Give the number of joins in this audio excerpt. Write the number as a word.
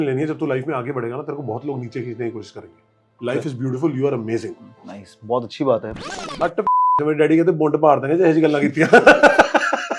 one